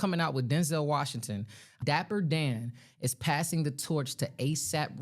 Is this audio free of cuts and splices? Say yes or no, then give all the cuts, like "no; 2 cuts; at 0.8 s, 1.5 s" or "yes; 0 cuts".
no; 1 cut; at 1.7 s